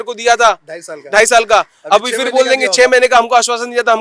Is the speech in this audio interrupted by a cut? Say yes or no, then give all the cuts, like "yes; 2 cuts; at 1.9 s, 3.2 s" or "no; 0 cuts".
no; 0 cuts